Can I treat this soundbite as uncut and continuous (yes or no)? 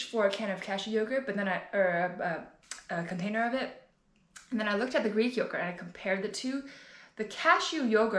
yes